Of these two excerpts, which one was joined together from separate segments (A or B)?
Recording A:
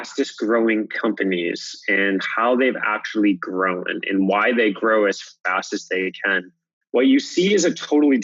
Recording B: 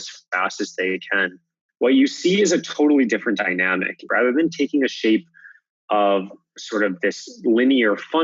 B